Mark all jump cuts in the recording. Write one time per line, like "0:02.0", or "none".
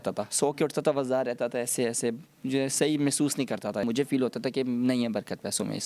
0:03.8